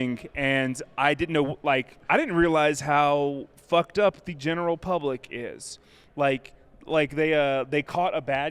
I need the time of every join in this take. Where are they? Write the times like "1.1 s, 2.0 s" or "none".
2.0 s